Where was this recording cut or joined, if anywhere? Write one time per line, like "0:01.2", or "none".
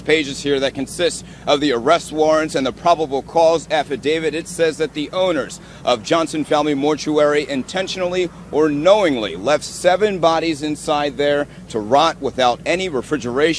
0:07.0